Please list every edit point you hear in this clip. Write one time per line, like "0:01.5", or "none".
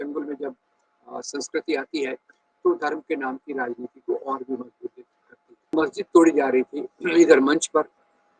0:05.7